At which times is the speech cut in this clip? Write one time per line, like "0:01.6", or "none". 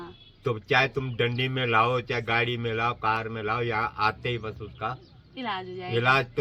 none